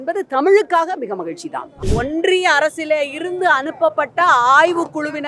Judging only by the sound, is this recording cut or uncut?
cut